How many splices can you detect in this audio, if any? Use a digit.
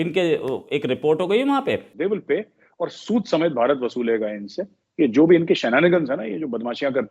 1